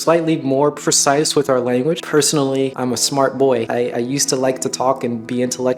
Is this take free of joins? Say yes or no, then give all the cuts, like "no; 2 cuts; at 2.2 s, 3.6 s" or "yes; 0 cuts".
yes; 0 cuts